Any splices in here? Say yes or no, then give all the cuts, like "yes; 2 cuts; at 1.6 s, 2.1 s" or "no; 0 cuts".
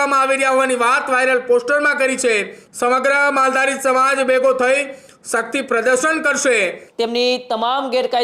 yes; 2 cuts; at 2.6 s, 6.8 s